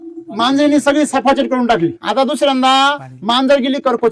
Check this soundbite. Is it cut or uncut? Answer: cut